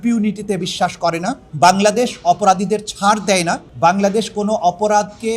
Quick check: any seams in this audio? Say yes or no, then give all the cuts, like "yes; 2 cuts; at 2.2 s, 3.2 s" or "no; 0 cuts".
yes; 2 cuts; at 1.4 s, 3.6 s